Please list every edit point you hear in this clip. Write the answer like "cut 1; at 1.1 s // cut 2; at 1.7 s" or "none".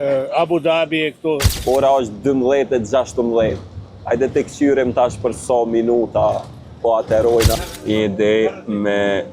cut 1; at 1.5 s // cut 2; at 7.6 s